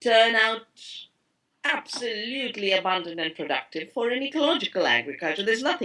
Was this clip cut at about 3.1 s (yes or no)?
no